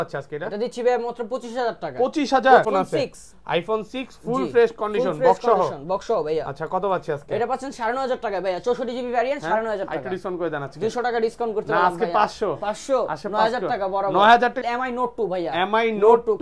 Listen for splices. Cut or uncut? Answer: cut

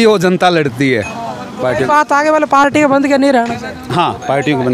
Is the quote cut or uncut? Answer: uncut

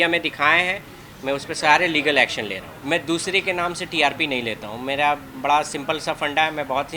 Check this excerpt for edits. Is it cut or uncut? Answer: cut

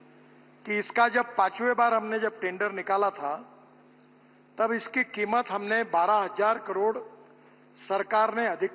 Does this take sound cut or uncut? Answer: uncut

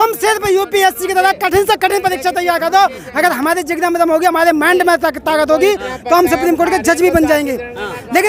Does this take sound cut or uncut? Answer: uncut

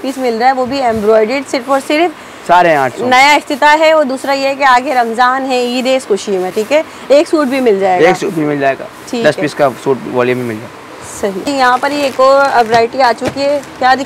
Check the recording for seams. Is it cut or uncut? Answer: uncut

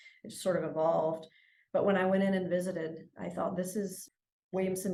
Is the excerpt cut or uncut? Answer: uncut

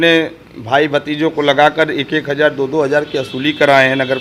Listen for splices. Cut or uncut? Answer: uncut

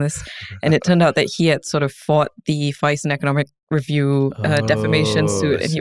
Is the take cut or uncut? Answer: uncut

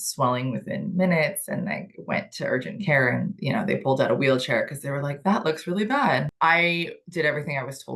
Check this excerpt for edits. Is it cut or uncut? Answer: cut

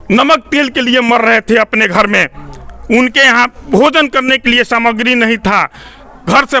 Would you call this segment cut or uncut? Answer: uncut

